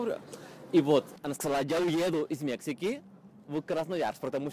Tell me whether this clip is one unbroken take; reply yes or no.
no